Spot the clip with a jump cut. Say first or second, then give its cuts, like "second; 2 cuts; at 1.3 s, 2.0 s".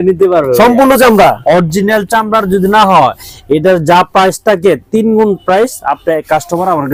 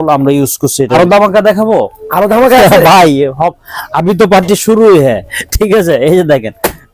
second; 1 cut; at 0.9 s